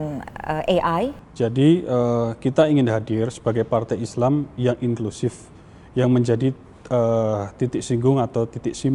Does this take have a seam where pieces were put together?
yes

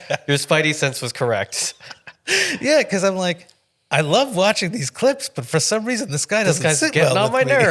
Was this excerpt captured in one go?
yes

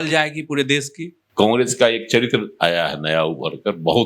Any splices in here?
yes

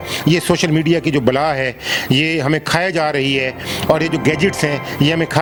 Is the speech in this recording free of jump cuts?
yes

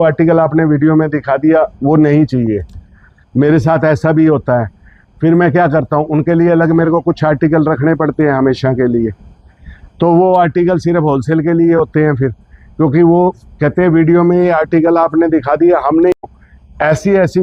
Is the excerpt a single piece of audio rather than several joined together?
no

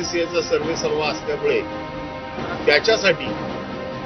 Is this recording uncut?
yes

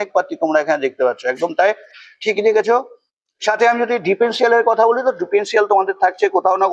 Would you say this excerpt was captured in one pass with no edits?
yes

